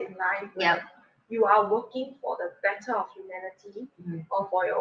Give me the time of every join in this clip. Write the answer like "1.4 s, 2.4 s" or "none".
none